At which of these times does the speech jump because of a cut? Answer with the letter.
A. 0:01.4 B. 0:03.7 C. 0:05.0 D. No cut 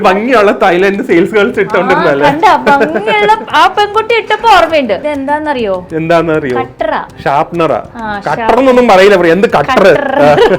C